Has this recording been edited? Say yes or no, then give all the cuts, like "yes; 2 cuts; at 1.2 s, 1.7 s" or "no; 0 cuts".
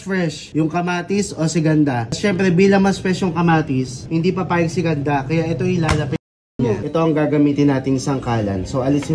yes; 3 cuts; at 2.1 s, 4.0 s, 6.8 s